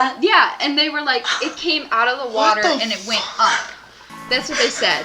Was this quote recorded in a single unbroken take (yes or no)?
yes